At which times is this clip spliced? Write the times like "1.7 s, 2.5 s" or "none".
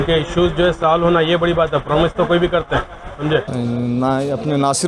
3.5 s

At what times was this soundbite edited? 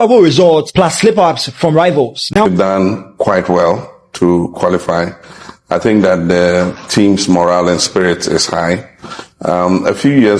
2.5 s

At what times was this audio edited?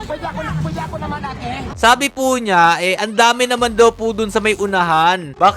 1.7 s

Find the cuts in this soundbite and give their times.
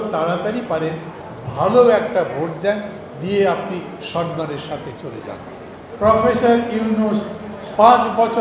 5.7 s

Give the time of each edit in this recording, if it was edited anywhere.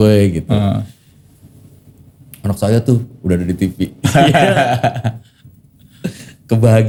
none

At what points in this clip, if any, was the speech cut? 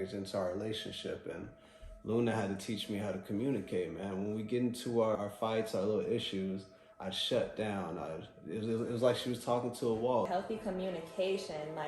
10.3 s

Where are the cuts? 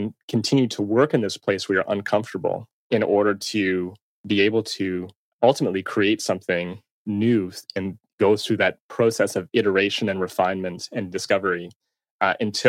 2.7 s, 5.2 s, 7.0 s

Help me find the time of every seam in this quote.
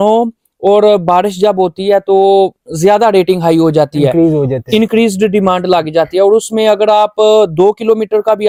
none

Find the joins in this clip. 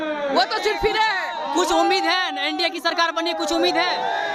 none

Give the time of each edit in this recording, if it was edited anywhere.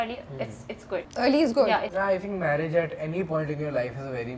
1.1 s, 1.9 s

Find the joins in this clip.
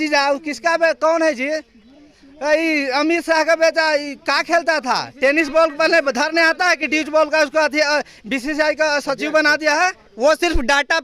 10.0 s

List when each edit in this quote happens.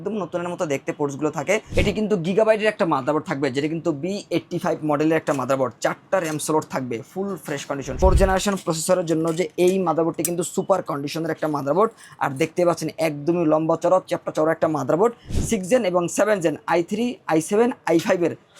1.7 s, 7.9 s, 15.3 s

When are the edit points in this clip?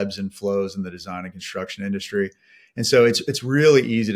none

